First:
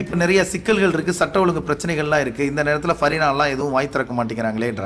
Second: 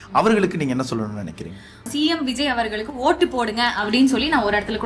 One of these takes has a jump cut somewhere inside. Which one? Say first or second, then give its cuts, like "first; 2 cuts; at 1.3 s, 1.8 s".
second; 1 cut; at 1.8 s